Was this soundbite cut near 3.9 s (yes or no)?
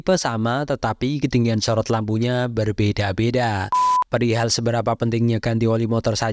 yes